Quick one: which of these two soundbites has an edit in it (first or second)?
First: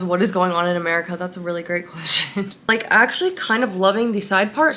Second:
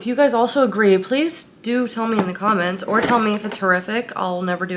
first